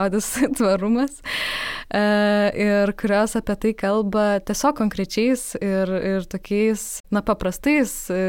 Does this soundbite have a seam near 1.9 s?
no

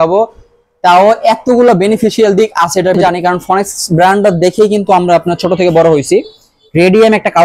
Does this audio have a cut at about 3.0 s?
yes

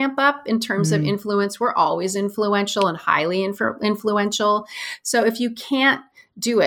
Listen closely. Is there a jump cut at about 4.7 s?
no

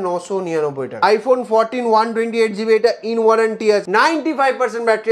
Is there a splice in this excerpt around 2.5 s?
no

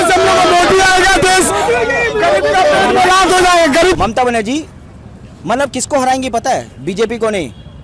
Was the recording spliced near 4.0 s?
yes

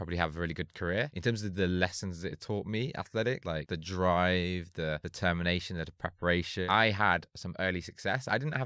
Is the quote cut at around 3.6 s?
yes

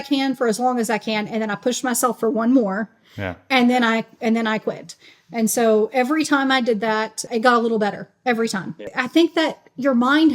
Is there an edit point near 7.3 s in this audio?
yes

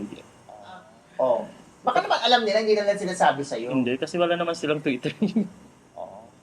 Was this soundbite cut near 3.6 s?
no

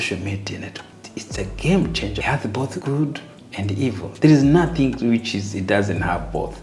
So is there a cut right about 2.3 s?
yes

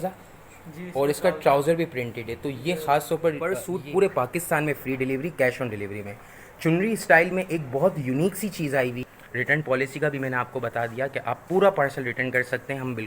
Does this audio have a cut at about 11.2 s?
no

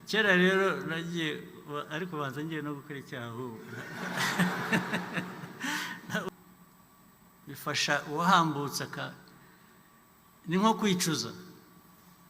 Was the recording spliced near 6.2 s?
yes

